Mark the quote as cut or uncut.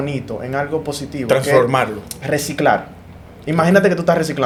uncut